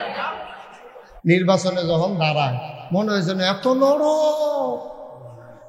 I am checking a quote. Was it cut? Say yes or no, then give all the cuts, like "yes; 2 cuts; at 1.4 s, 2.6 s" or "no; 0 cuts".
yes; 1 cut; at 1.1 s